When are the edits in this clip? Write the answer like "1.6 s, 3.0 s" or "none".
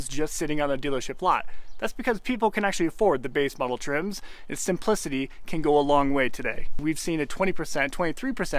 6.7 s